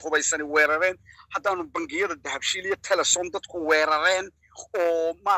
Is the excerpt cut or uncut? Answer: uncut